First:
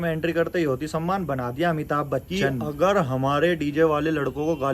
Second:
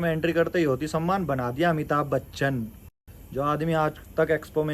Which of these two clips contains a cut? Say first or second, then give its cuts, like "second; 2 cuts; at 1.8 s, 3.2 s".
first; 1 cut; at 2.3 s